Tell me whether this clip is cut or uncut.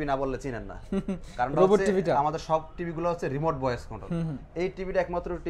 uncut